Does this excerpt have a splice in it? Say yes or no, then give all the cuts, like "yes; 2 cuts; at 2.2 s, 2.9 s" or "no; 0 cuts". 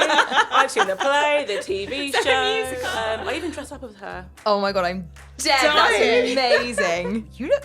yes; 2 cuts; at 2.8 s, 4.2 s